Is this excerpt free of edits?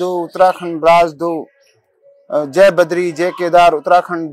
yes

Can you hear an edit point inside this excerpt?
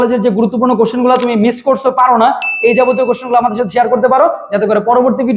no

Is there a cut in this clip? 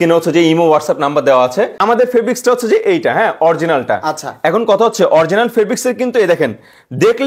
yes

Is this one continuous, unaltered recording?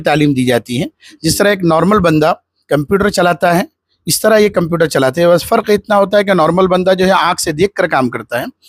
yes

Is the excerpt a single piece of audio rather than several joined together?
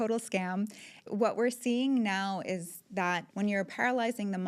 no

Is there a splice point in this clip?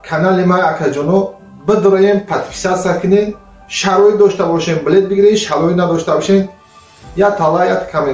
yes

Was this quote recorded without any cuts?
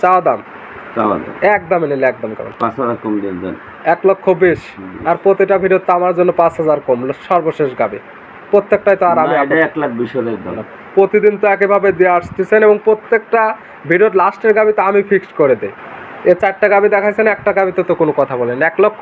yes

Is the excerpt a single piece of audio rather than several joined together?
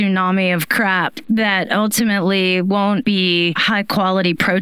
no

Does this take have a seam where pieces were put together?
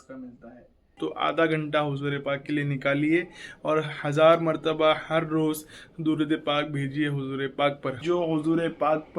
yes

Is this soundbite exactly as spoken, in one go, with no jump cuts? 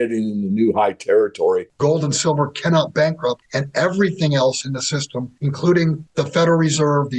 no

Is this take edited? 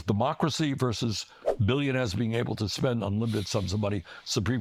no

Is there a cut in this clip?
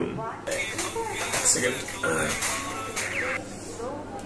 no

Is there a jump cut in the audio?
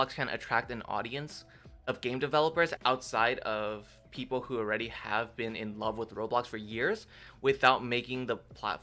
yes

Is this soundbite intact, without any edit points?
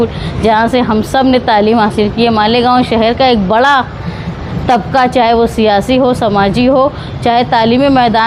yes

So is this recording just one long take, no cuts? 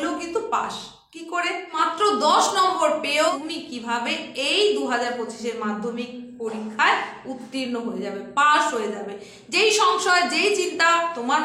no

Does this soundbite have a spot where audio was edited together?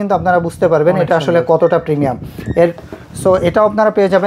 no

